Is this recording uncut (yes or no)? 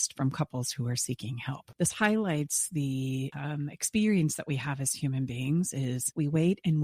no